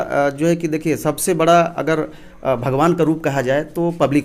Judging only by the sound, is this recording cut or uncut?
uncut